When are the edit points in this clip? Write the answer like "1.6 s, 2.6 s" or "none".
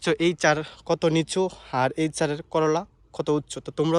none